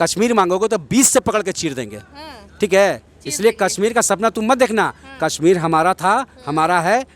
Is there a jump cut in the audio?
no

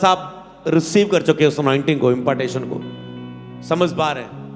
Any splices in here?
no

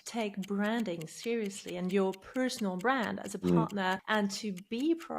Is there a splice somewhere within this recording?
yes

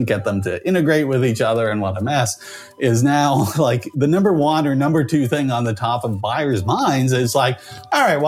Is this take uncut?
yes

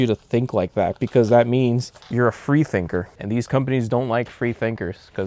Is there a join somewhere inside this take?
yes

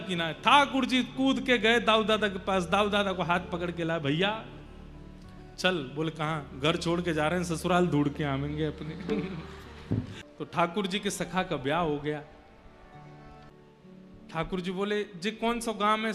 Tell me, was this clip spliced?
yes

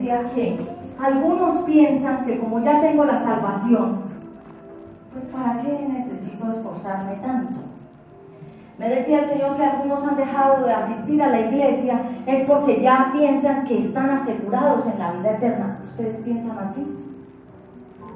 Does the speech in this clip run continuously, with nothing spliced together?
yes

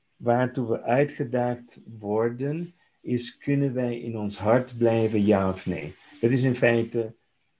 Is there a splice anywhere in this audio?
no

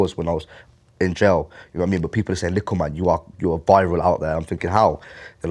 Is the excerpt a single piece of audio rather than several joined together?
yes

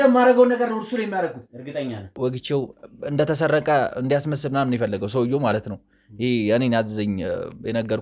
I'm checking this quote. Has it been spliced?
yes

